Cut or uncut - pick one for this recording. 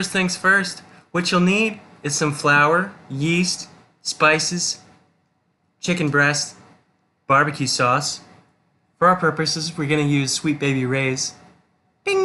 uncut